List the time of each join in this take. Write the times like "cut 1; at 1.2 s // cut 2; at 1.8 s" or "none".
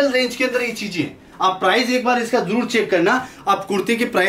none